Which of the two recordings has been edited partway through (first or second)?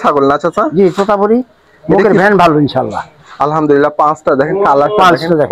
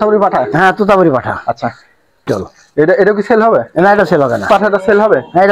second